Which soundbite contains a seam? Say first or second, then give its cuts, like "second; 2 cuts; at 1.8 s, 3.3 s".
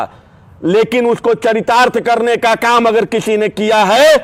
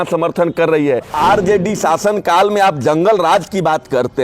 second; 1 cut; at 1.1 s